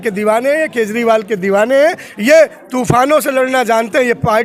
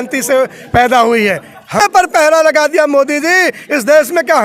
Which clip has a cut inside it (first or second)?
second